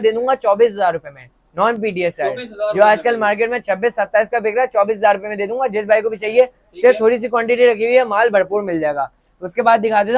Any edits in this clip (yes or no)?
no